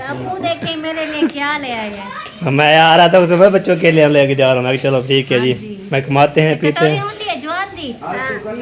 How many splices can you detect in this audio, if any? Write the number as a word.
zero